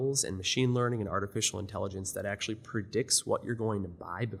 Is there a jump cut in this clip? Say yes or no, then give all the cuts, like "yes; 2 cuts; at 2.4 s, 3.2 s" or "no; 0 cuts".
no; 0 cuts